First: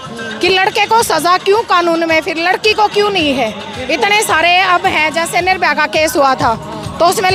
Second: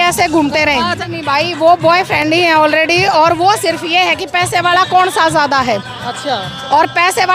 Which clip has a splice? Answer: second; 1 cut; at 1.0 s

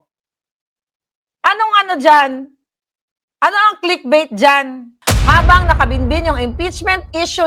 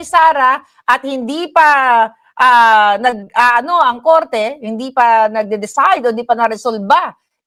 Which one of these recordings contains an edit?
first; 1 cut; at 5.1 s

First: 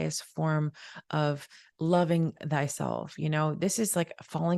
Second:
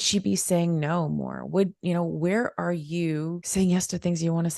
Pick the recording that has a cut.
second; 1 cut; at 3.4 s

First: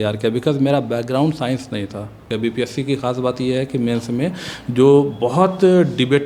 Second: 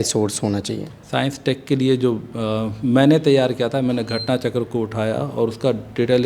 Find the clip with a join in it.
first; 1 cut; at 2.2 s

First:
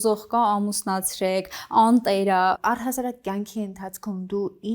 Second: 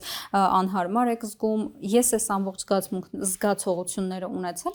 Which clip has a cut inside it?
first; 1 cut; at 2.6 s

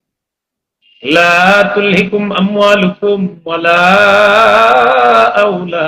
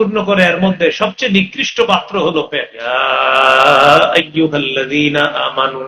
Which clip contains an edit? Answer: second; 1 cut; at 2.8 s

